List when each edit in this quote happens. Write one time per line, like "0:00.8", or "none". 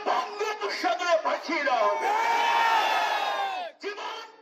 none